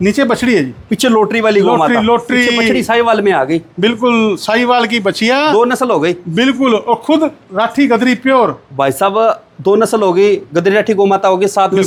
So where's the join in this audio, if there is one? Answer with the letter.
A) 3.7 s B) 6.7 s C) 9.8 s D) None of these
D